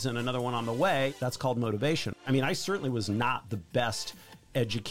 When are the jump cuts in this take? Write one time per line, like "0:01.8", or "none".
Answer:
0:01.1
0:02.2

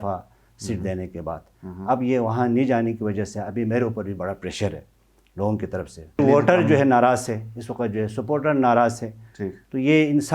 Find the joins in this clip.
0:06.2

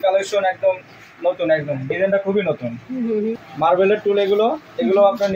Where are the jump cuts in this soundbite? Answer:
0:03.5

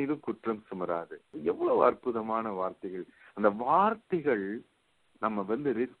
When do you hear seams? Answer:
none

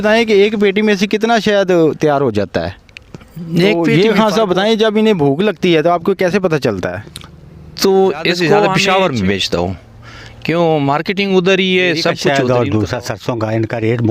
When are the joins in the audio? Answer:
0:03.8
0:08.8
0:12.2

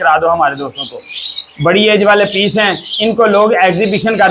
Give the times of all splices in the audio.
none

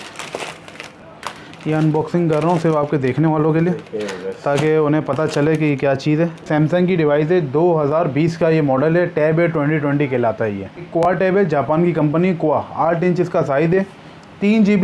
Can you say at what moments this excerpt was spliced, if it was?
0:01.0
0:06.5
0:10.9

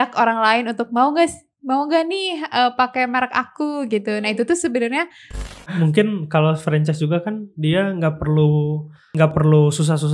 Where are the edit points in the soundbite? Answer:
0:05.6
0:09.1

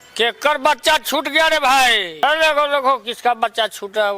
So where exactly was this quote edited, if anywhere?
0:02.2

